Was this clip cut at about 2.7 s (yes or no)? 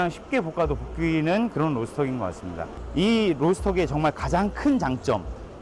yes